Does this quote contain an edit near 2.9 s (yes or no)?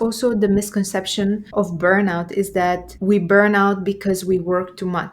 yes